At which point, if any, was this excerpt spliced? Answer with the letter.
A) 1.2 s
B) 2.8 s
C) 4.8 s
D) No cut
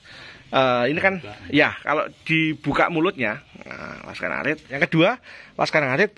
C